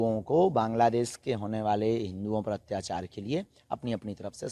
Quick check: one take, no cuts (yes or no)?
yes